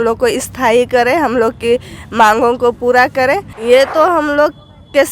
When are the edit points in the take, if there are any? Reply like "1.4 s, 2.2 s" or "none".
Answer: 3.5 s